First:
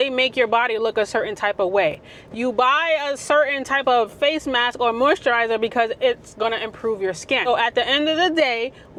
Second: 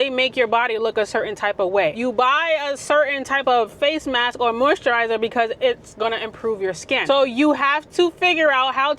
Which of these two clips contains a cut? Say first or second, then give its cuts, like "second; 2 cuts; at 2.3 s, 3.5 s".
second; 2 cuts; at 2.0 s, 7.0 s